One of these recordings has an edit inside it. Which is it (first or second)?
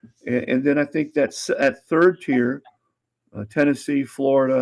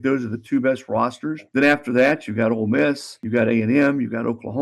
second